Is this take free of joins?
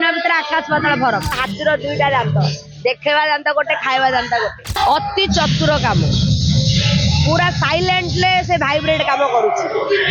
no; 2 cuts; at 1.4 s, 4.7 s

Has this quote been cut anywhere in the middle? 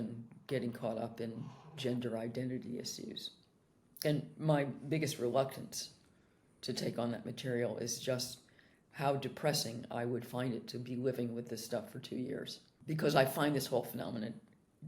yes; 1 cut; at 12.8 s

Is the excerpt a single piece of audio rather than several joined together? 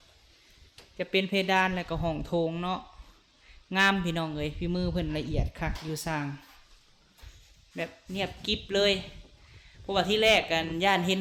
yes; 0 cuts

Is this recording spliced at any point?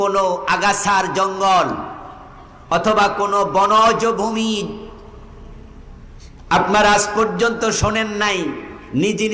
no; 0 cuts

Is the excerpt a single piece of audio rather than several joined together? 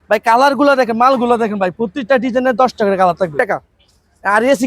no; 1 cut; at 3.3 s

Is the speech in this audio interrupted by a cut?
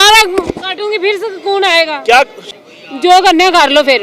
yes; 1 cut; at 2.4 s

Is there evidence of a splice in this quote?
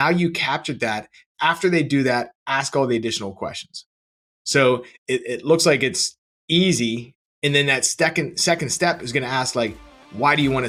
no; 0 cuts

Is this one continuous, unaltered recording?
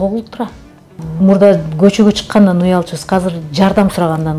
no; 1 cut; at 1.0 s

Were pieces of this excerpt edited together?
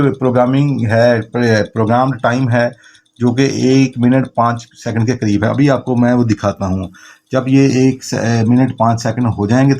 no; 0 cuts

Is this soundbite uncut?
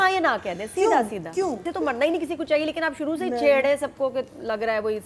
no; 1 cut; at 1.7 s

